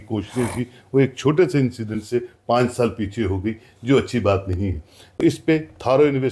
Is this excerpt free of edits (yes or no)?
no